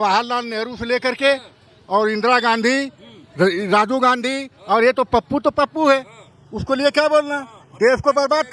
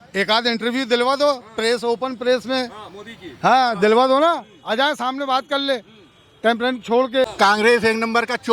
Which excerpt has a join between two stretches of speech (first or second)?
second